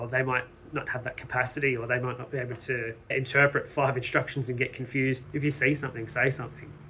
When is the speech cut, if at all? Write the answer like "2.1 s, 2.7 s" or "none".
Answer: 5.2 s

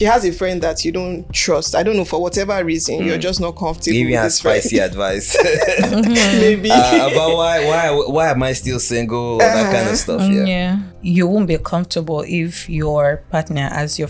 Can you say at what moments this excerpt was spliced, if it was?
10.9 s

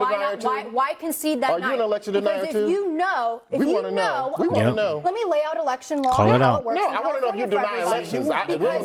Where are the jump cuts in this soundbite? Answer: none

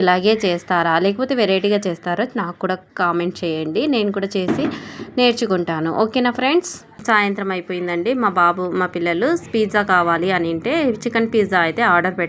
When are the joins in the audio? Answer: 7.0 s

